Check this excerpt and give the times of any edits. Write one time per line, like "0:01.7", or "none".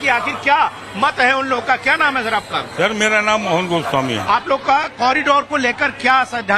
0:02.2